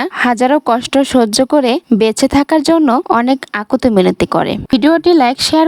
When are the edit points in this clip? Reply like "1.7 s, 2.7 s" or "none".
4.7 s